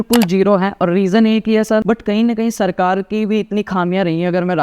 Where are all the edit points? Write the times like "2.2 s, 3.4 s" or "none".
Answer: 1.8 s

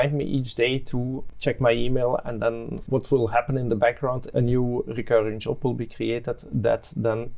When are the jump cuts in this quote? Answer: 1.2 s, 2.8 s, 4.3 s

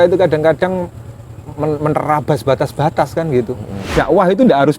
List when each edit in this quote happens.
3.7 s

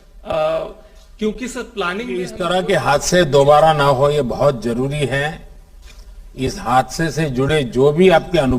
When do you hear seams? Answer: 2.3 s

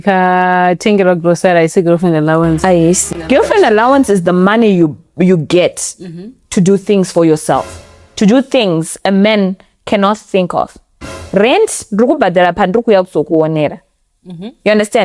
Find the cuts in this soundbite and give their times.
3.0 s

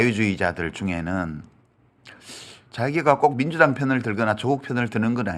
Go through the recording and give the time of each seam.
none

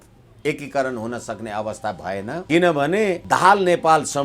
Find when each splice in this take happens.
2.4 s, 3.2 s

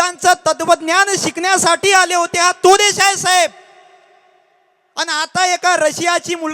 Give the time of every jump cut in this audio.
none

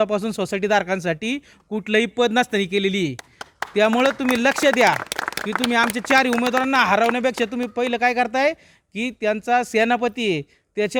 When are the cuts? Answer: none

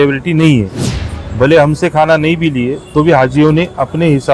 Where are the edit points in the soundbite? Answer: none

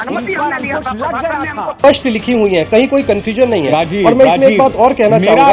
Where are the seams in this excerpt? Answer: 1.8 s

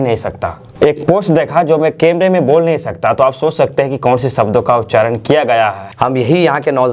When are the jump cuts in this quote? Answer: 5.8 s

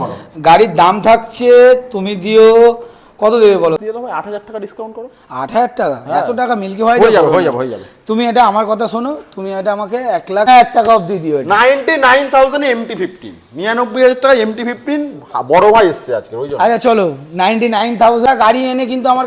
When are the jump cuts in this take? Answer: 3.8 s, 10.5 s, 18.2 s

